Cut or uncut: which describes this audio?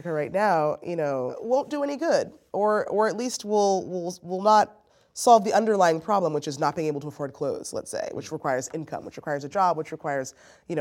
cut